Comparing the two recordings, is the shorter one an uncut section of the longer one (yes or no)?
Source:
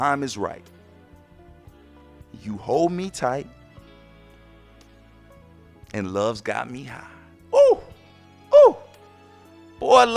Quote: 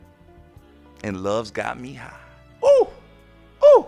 no